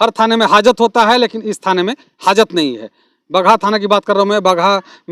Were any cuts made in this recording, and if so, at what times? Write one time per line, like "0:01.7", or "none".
none

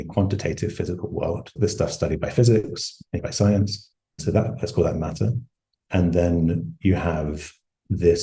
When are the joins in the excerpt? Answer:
0:01.5
0:03.2
0:04.2

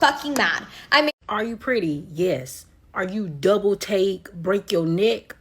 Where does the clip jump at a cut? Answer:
0:01.1

